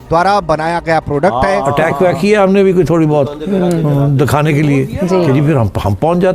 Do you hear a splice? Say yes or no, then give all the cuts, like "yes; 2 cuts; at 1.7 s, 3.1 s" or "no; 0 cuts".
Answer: yes; 1 cut; at 1.6 s